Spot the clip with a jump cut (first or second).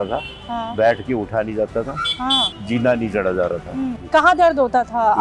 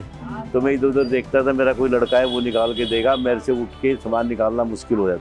first